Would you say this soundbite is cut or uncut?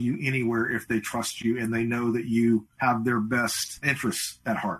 cut